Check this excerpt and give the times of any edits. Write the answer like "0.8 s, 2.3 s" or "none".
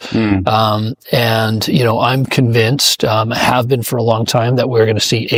none